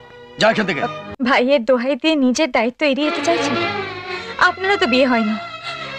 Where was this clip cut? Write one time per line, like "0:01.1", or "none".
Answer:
0:01.0